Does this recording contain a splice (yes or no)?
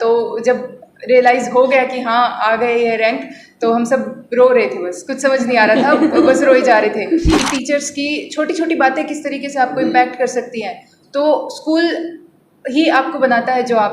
yes